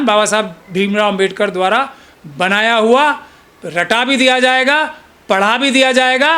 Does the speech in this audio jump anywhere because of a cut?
no; 0 cuts

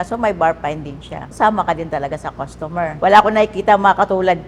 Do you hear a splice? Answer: yes; 2 cuts; at 1.3 s, 2.9 s

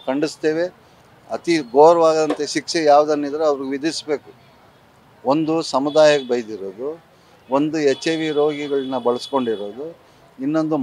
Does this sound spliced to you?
no; 0 cuts

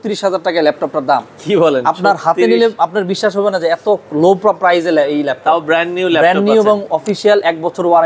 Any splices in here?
no; 0 cuts

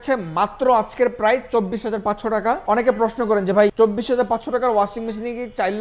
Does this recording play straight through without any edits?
no; 2 cuts; at 2.6 s, 3.7 s

